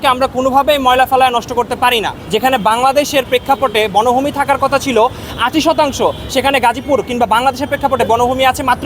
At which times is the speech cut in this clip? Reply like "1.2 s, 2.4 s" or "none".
none